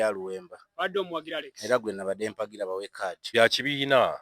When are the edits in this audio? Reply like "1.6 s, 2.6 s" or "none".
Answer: 3.2 s